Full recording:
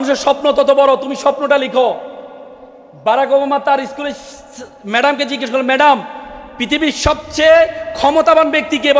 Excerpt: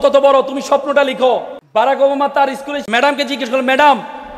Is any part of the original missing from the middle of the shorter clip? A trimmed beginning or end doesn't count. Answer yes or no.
yes